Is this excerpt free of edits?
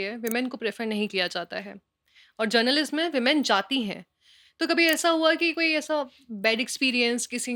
yes; 0 cuts

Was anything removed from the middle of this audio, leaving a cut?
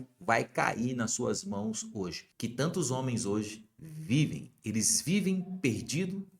yes; 1 cut; at 2.2 s

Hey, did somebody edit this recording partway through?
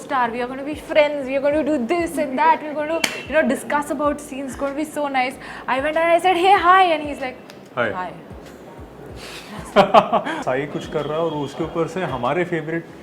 yes; 1 cut; at 10.4 s

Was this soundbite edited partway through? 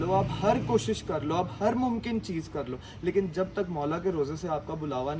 no; 0 cuts

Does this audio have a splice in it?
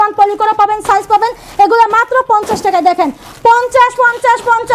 no; 0 cuts

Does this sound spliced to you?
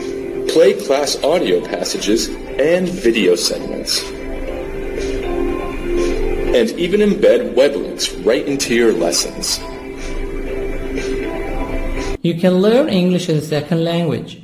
no; 0 cuts

